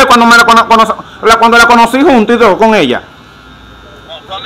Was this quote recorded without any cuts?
yes; 0 cuts

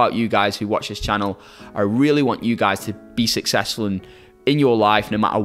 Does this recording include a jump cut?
no; 0 cuts

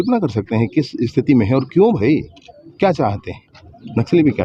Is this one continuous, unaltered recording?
yes; 0 cuts

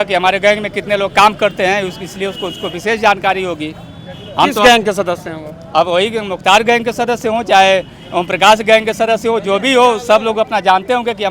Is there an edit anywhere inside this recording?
no; 0 cuts

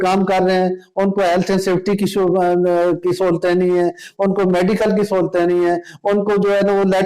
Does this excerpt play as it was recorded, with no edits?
yes; 0 cuts

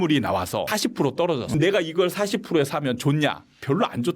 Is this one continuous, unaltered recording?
no; 1 cut; at 1.1 s

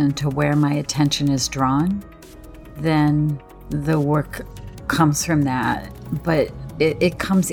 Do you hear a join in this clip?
no; 0 cuts

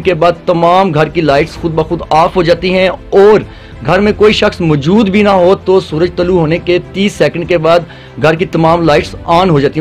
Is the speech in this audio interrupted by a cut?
no; 0 cuts

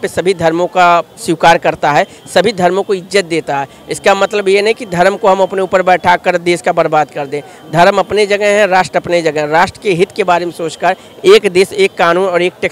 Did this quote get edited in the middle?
no; 0 cuts

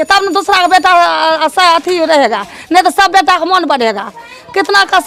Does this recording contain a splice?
no; 0 cuts

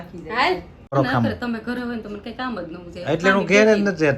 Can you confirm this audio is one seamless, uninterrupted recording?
no; 1 cut; at 0.9 s

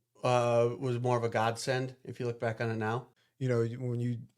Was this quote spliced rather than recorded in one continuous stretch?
yes; 1 cut; at 3.1 s

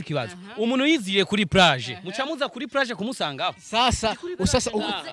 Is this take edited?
no; 0 cuts

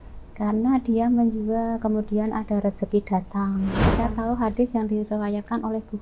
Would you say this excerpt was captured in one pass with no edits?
no; 1 cut; at 3.9 s

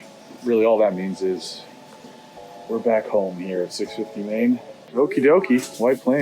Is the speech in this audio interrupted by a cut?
yes; 1 cut; at 4.8 s

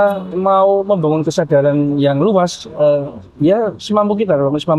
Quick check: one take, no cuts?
yes; 0 cuts

